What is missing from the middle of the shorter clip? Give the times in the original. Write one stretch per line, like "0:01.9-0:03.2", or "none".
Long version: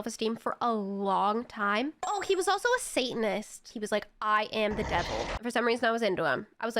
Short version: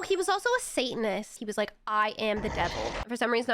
0:03.5-0:03.7